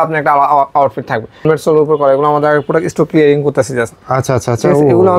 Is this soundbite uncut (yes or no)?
no